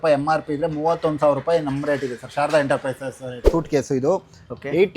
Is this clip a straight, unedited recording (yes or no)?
no